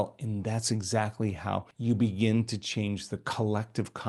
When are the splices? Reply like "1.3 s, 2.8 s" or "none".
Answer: 1.7 s